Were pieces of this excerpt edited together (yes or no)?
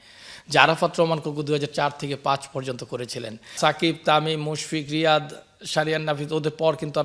yes